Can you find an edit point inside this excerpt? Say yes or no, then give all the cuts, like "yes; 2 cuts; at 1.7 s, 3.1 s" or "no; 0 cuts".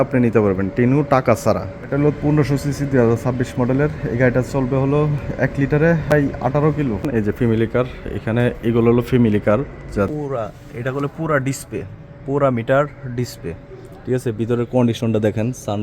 yes; 4 cuts; at 1.9 s, 6.1 s, 7.0 s, 10.1 s